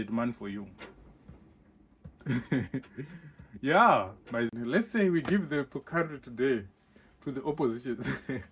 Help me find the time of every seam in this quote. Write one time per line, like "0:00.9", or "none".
0:04.5